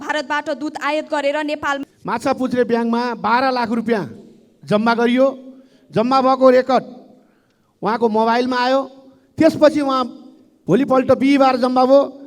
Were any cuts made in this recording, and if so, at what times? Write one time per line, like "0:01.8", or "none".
0:01.8